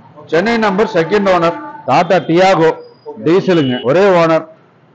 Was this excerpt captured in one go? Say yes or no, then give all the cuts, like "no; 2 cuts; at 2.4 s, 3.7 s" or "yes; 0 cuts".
no; 2 cuts; at 1.7 s, 3.8 s